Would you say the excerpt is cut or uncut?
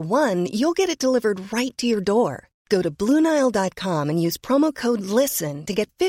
uncut